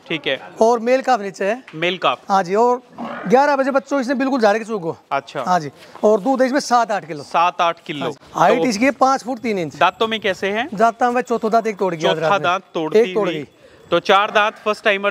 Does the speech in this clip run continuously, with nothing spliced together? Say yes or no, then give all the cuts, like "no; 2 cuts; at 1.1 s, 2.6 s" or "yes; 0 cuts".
no; 1 cut; at 8.2 s